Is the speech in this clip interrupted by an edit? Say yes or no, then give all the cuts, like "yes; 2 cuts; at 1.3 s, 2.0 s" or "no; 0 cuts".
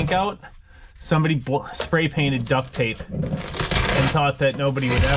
no; 0 cuts